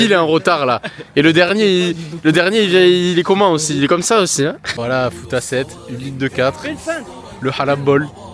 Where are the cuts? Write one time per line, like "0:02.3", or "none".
0:04.7